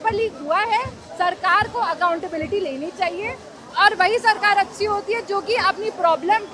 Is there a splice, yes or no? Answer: no